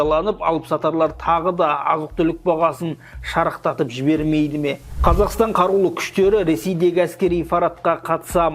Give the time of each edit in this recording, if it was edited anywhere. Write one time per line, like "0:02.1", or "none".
0:04.9